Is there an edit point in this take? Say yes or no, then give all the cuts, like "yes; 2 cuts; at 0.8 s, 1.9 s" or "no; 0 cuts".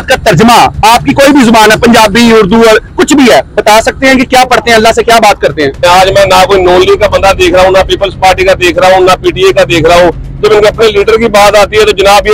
yes; 1 cut; at 5.8 s